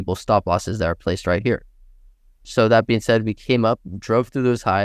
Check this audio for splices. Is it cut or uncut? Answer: uncut